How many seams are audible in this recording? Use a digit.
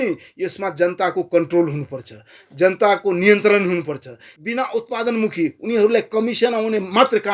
1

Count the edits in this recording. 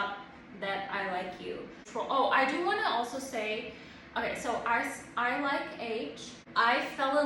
2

